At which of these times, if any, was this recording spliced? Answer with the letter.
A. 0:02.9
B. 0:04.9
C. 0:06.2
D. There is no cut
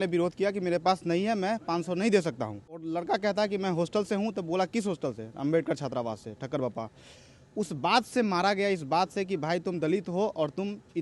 A